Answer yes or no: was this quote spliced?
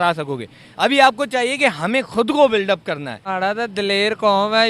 yes